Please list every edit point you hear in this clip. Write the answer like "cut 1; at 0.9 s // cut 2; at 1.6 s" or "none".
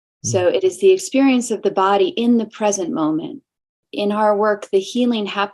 cut 1; at 3.8 s